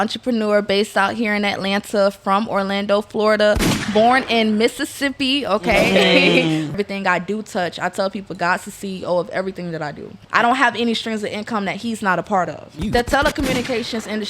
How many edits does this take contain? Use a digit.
3